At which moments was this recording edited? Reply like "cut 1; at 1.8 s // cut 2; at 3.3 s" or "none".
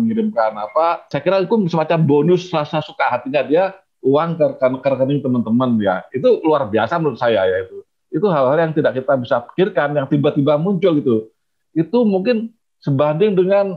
cut 1; at 1.1 s